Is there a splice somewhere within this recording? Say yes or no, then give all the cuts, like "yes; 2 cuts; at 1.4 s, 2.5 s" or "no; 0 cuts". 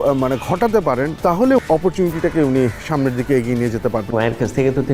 yes; 2 cuts; at 1.6 s, 4.1 s